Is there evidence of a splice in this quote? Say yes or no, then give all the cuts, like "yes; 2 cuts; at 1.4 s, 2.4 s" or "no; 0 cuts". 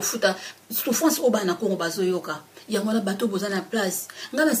no; 0 cuts